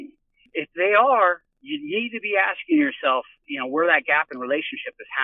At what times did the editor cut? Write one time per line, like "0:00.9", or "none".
none